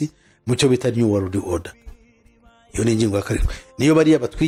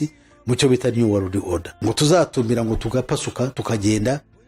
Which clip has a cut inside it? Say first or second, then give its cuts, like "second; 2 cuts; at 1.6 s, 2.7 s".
second; 1 cut; at 1.7 s